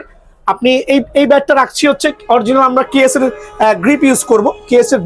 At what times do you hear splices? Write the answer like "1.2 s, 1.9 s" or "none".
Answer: none